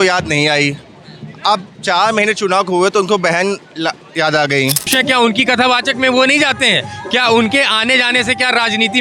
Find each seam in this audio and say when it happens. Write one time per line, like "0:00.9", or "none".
0:04.9